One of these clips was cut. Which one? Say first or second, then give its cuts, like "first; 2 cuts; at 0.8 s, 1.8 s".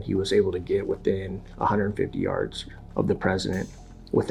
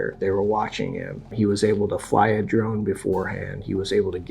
second; 1 cut; at 1.3 s